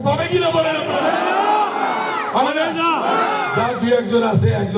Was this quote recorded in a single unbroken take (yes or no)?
yes